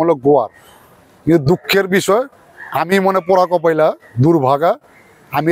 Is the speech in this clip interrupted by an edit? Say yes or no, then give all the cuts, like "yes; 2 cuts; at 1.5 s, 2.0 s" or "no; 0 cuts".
no; 0 cuts